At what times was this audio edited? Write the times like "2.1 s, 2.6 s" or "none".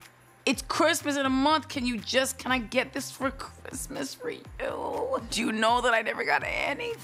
5.3 s